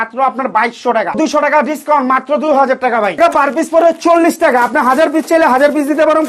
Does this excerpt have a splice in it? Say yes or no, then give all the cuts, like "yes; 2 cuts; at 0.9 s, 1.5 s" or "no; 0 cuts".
yes; 2 cuts; at 1.2 s, 3.2 s